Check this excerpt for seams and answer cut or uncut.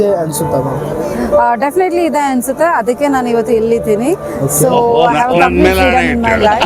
uncut